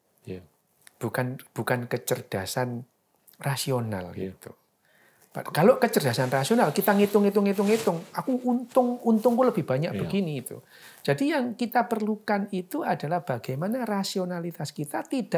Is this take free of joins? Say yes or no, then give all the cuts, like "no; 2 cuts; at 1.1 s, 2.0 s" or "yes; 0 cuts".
yes; 0 cuts